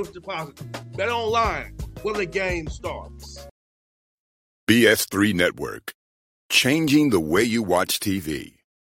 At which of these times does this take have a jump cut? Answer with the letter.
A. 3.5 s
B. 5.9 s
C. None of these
A